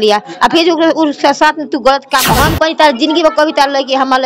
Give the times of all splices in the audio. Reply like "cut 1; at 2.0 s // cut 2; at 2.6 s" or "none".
cut 1; at 2.3 s

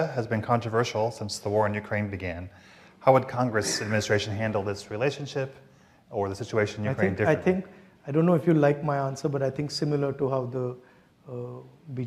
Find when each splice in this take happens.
none

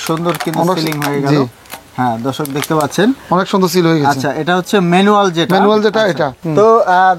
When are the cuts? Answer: none

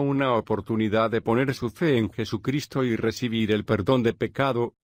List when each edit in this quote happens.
none

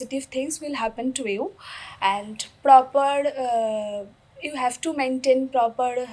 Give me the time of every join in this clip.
none

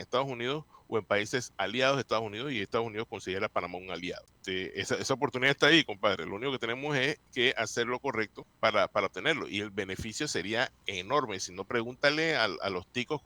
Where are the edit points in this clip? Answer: cut 1; at 4.3 s // cut 2; at 8.4 s

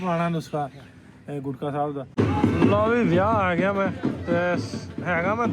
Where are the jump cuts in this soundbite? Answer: cut 1; at 2.1 s

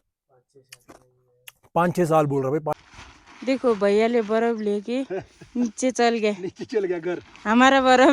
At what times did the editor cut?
cut 1; at 2.8 s

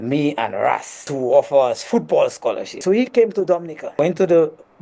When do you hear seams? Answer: cut 1; at 1.0 s // cut 2; at 2.8 s // cut 3; at 3.8 s

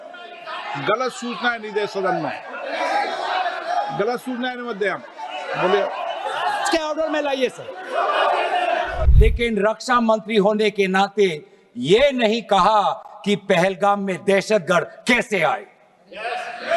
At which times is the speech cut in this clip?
cut 1; at 9.1 s

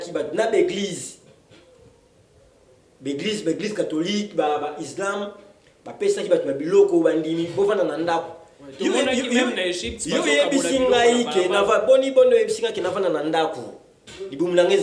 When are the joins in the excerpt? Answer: none

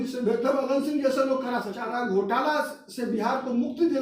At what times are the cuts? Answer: cut 1; at 1.8 s

